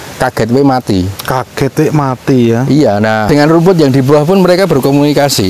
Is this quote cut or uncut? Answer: cut